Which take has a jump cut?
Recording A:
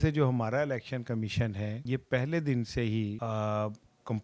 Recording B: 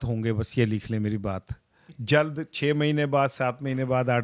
A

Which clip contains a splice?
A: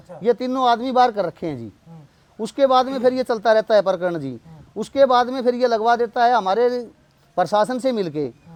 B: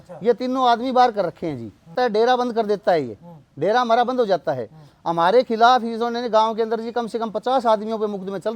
B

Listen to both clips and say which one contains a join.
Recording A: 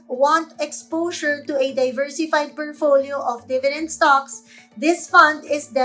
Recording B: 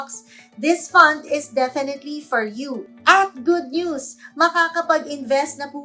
B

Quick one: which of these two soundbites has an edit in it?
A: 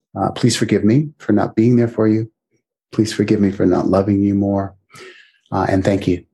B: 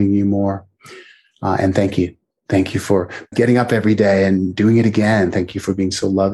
B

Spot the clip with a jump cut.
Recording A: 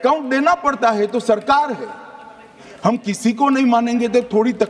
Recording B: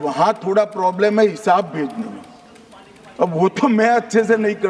A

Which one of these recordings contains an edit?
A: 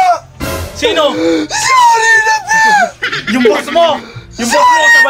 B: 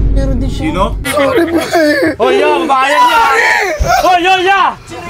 B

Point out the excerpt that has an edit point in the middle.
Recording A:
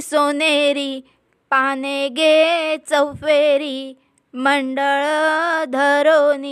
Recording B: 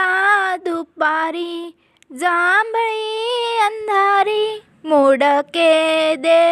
B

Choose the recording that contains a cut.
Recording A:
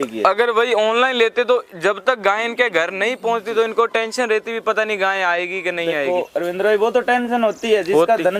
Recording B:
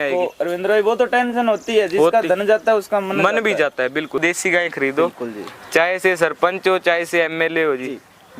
B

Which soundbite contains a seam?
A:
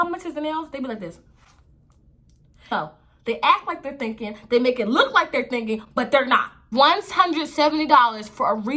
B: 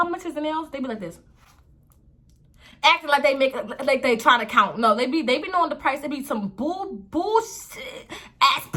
A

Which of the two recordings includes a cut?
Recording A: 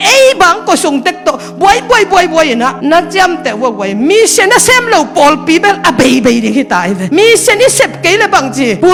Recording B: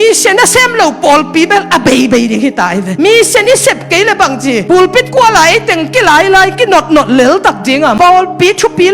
B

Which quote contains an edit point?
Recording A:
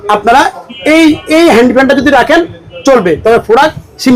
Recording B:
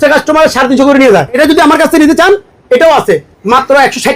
B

